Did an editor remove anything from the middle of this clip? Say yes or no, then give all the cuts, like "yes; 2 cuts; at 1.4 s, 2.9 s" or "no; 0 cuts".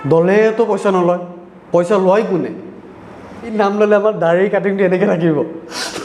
yes; 1 cut; at 3.5 s